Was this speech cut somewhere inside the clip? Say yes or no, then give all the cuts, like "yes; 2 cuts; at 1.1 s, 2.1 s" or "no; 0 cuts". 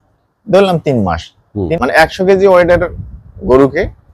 yes; 1 cut; at 1.7 s